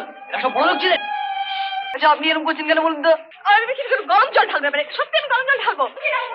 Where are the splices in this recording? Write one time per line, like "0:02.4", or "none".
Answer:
0:01.9